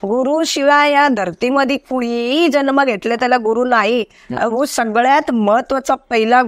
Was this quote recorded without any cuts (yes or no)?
yes